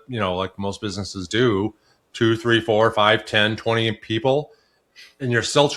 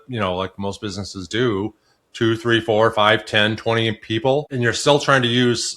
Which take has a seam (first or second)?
second